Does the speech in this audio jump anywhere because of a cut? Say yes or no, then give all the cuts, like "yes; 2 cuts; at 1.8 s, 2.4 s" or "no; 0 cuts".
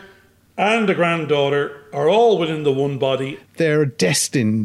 yes; 1 cut; at 3.4 s